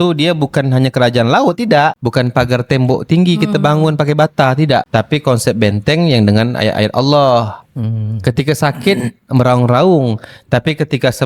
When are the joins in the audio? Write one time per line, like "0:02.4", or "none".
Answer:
0:02.0
0:07.6